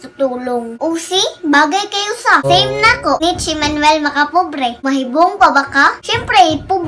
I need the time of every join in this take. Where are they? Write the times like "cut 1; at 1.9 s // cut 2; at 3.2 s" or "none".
cut 1; at 2.4 s // cut 2; at 3.2 s // cut 3; at 4.8 s

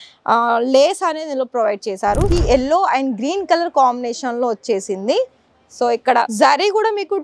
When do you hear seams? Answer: cut 1; at 2.3 s

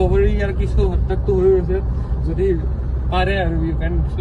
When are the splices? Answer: none

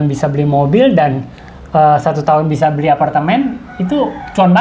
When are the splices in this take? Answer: none

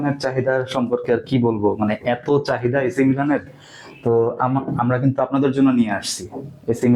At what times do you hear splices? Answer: none

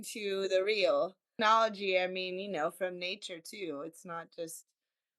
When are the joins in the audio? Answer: cut 1; at 1.3 s

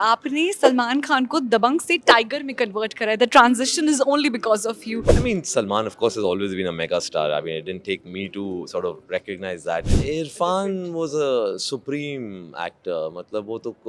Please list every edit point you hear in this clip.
cut 1; at 4.9 s // cut 2; at 9.9 s

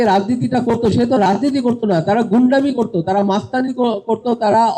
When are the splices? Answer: none

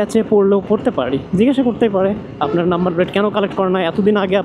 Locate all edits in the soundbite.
none

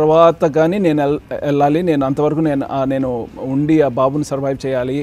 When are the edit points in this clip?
none

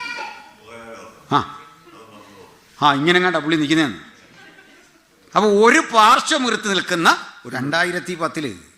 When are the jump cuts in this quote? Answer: cut 1; at 7.4 s

